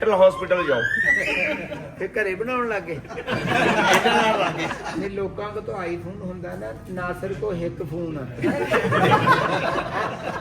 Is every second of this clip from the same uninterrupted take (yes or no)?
no